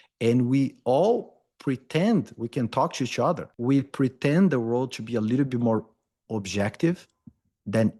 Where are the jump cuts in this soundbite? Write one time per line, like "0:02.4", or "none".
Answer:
0:03.7